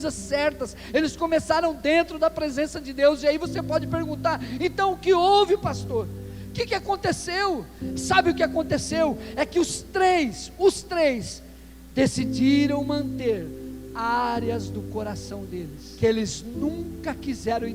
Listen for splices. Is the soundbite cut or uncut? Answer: cut